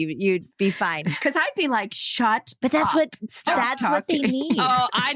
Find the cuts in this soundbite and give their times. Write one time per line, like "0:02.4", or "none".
0:01.0